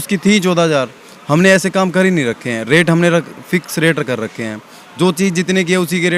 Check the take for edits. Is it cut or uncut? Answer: uncut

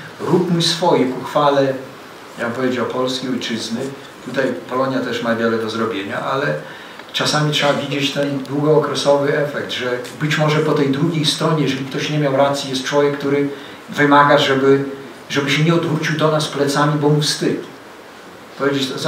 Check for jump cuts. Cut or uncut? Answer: uncut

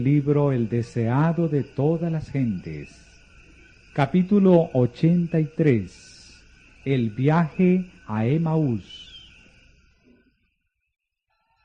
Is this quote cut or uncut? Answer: uncut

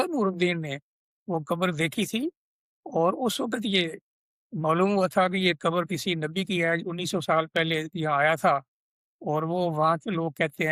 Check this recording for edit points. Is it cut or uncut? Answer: uncut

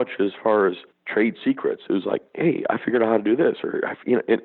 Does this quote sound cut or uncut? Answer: cut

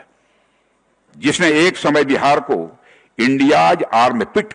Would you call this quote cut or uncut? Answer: uncut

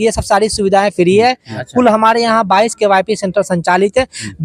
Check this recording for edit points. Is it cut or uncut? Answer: cut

